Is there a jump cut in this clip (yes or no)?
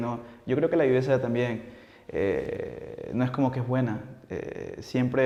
no